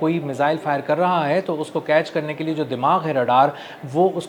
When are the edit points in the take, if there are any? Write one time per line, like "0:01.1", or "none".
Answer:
none